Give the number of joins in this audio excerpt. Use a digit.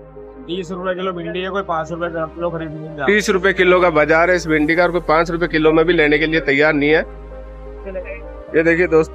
1